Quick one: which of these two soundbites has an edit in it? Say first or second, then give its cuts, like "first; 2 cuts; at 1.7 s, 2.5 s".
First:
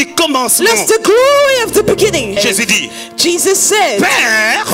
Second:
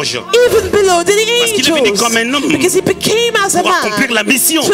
first; 1 cut; at 2.4 s